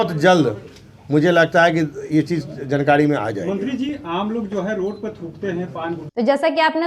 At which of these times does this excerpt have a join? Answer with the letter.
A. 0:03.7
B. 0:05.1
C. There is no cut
C